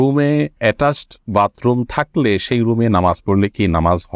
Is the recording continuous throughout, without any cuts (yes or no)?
yes